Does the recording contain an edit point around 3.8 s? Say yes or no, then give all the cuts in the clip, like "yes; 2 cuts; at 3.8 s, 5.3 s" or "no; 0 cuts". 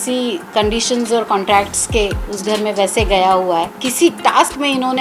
yes; 1 cut; at 3.8 s